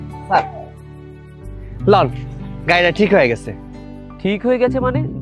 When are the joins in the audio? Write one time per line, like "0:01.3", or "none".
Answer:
none